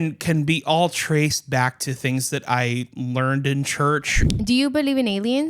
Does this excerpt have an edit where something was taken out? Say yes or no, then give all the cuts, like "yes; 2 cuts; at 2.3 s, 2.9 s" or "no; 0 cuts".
yes; 1 cut; at 4.2 s